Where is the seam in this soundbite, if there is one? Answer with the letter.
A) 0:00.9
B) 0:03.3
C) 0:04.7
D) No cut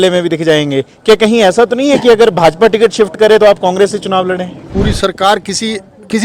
C